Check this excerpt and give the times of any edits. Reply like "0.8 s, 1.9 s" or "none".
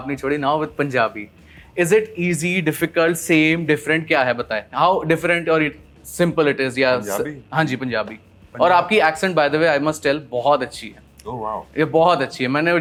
none